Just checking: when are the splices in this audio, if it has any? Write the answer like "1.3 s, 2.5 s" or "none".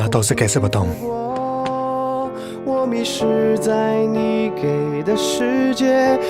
none